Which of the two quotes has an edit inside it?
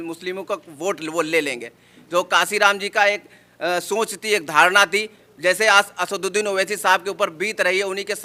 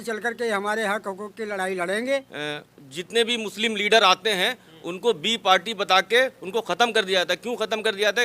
second; 1 cut; at 2.3 s

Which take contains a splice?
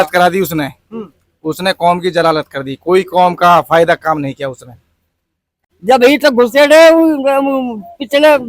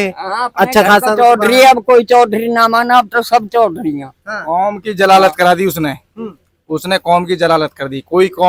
first; 1 cut; at 5.6 s

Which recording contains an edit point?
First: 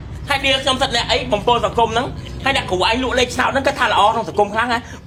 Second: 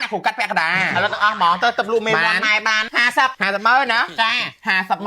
second; 1 cut; at 3.1 s

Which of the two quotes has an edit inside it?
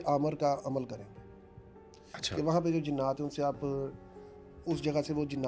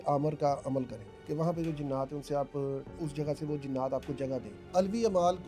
second; 3 cuts; at 1.1 s, 3.0 s, 4.7 s

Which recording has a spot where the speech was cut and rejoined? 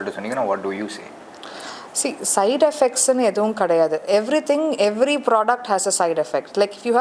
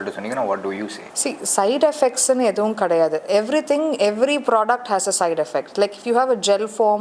second; 1 cut; at 1.0 s

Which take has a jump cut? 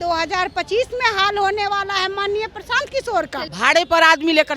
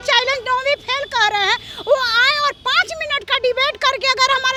first; 1 cut; at 3.4 s

